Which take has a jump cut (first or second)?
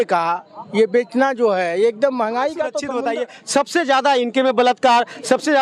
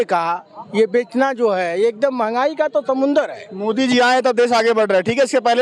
first